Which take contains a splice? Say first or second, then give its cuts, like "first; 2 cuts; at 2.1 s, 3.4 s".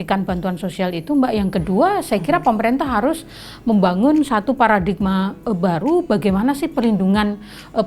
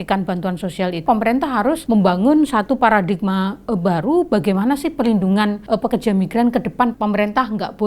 second; 4 cuts; at 1.0 s, 1.8 s, 5.6 s, 6.9 s